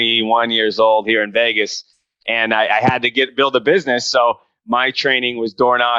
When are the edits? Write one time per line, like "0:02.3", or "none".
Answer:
none